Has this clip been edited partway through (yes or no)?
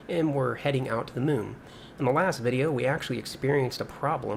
no